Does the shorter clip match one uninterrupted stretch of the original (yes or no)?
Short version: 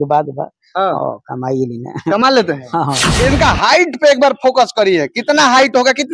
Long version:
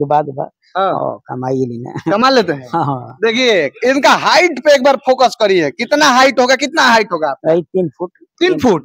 no